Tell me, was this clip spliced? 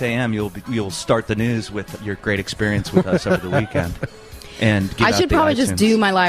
yes; 1 cut; at 1.9 s

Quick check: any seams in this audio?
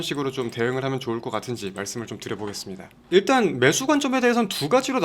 yes; 1 cut; at 3.0 s

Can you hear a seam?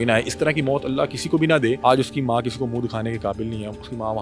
yes; 1 cut; at 1.8 s

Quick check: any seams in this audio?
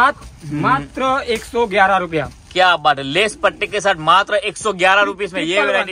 no; 0 cuts

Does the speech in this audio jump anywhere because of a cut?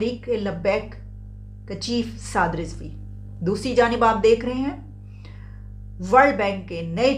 no; 0 cuts

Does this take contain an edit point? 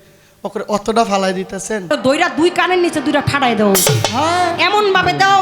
yes; 1 cut; at 1.9 s

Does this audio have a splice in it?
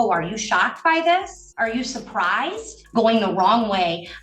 yes; 2 cuts; at 1.4 s, 2.8 s

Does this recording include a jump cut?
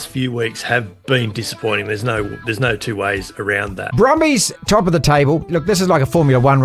yes; 3 cuts; at 3.8 s, 4.5 s, 5.5 s

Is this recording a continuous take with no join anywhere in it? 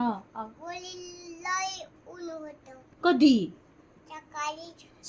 yes; 0 cuts

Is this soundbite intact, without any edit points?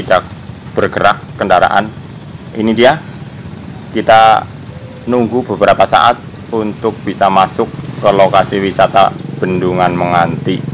yes; 0 cuts

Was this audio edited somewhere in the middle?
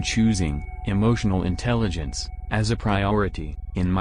no; 0 cuts

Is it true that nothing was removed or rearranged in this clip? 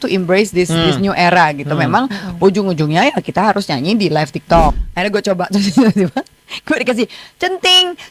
no; 1 cut; at 4.8 s

